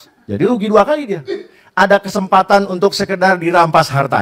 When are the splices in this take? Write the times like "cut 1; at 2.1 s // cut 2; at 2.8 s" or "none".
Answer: none

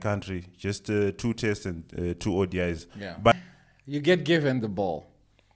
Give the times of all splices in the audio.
cut 1; at 3.3 s

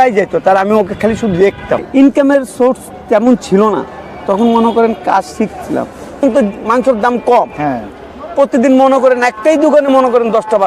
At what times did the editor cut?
cut 1; at 1.9 s // cut 2; at 6.2 s

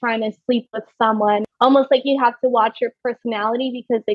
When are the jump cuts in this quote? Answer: cut 1; at 1.4 s

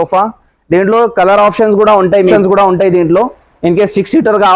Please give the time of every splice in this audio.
cut 1; at 2.3 s

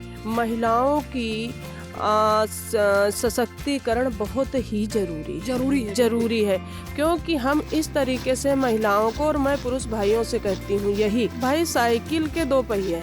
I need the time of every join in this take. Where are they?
none

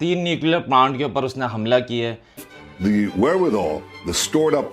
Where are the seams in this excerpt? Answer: cut 1; at 2.3 s

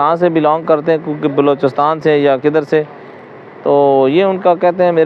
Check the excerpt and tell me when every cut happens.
none

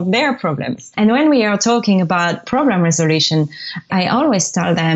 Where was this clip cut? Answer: cut 1; at 1.0 s // cut 2; at 2.5 s // cut 3; at 3.9 s

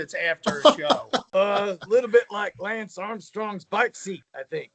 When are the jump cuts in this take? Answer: cut 1; at 1.3 s

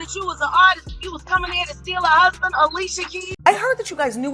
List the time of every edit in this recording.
cut 1; at 3.3 s

